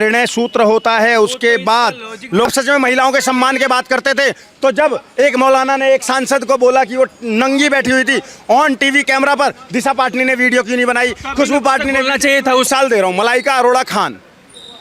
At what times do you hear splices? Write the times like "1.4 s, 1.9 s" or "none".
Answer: 2.5 s, 12.7 s